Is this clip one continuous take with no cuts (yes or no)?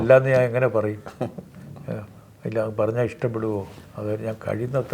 no